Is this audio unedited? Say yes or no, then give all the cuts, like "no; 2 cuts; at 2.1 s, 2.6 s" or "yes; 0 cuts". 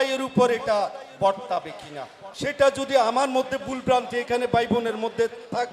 no; 1 cut; at 2.2 s